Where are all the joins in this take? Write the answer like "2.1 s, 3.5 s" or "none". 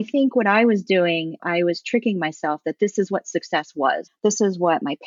1.4 s, 4.1 s